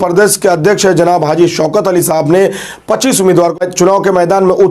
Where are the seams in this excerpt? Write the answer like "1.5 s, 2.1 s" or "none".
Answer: 3.6 s